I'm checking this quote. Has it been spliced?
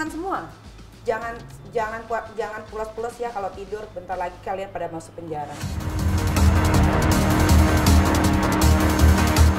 no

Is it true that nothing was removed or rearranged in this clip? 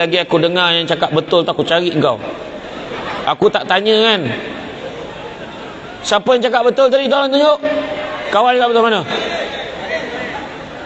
yes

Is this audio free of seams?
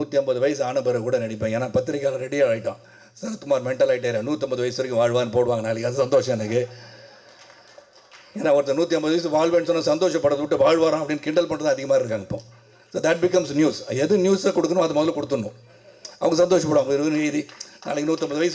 yes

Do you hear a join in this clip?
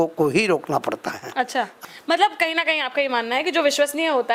yes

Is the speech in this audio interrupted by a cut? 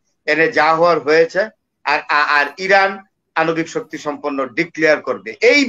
no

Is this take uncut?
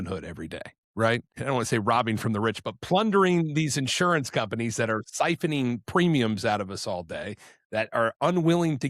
no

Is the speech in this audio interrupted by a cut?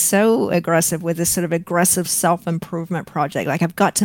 no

